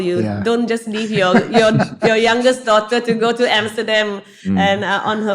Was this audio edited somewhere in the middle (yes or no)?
no